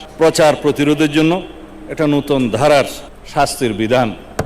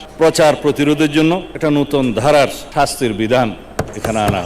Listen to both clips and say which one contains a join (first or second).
second